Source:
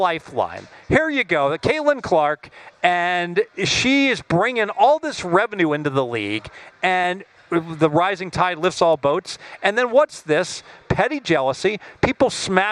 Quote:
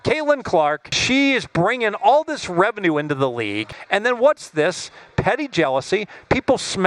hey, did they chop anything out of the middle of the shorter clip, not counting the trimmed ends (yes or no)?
yes